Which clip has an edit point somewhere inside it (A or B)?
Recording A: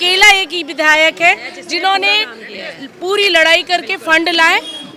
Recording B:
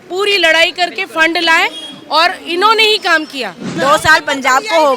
B